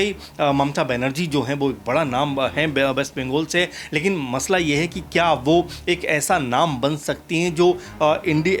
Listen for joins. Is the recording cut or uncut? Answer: uncut